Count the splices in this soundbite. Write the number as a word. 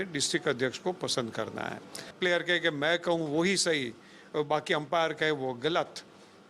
one